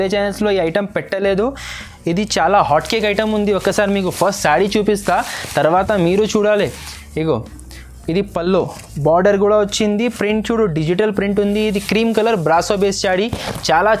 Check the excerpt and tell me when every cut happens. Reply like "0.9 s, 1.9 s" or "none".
none